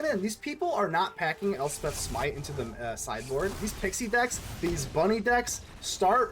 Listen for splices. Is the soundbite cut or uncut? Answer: cut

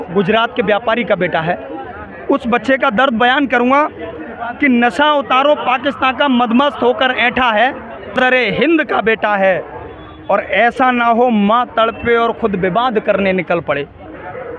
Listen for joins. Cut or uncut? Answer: cut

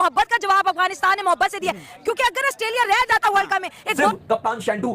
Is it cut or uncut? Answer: cut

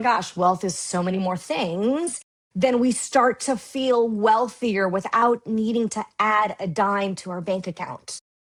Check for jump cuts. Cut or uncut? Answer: uncut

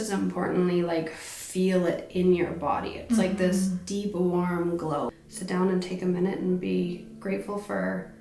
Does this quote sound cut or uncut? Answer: cut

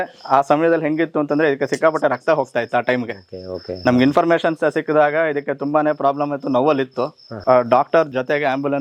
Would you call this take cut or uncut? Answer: uncut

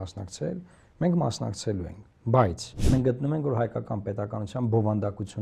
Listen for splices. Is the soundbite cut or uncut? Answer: cut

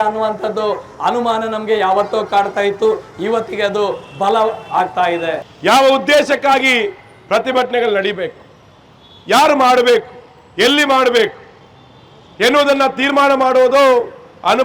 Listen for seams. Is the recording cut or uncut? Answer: cut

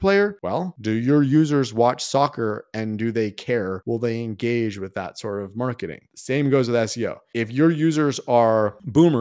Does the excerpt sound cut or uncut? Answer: cut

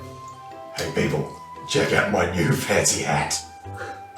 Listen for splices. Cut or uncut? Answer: uncut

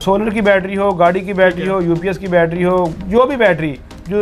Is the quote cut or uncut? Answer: cut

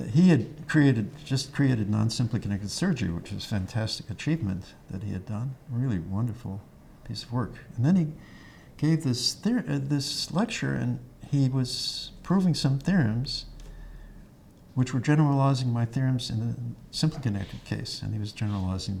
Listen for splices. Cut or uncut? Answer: uncut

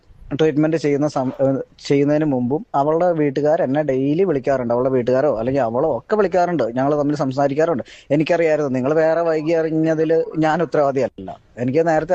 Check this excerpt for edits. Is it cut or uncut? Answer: uncut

